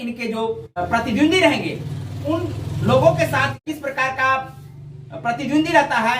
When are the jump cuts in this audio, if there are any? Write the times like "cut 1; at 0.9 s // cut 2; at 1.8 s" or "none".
cut 1; at 0.8 s // cut 2; at 3.6 s